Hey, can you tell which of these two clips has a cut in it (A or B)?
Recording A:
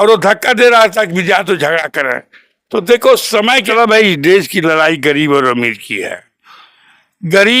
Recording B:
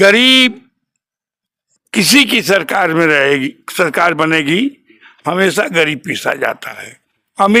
A